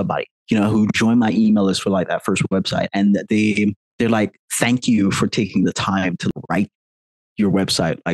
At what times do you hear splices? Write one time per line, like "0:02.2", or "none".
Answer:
0:03.9
0:06.3